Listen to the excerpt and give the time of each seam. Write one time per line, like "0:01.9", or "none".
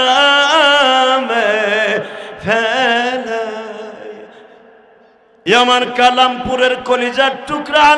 0:05.5

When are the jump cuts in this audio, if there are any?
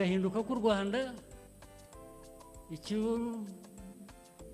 0:01.2
0:02.7

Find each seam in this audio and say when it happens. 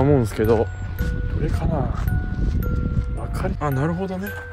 0:01.0
0:03.6

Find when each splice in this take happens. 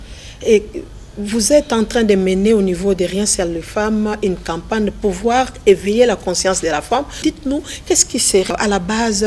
0:05.0
0:07.2
0:08.5

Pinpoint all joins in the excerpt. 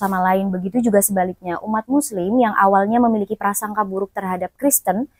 none

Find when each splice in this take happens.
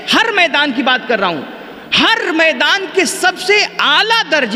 none

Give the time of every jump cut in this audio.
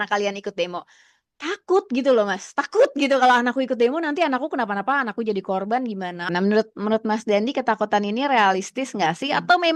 0:06.2

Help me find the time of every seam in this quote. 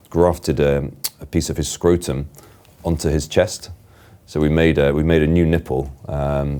none

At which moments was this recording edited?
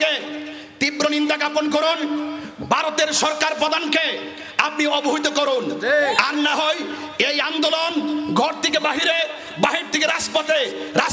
none

